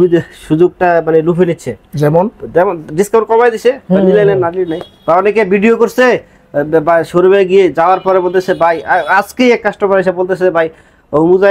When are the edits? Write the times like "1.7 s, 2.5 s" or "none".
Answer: none